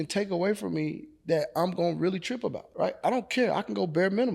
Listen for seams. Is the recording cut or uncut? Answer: cut